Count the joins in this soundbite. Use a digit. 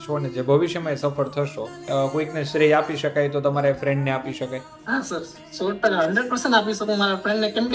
2